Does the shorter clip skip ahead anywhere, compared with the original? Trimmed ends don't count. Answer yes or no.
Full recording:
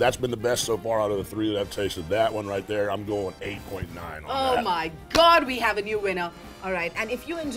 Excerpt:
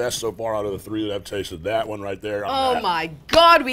yes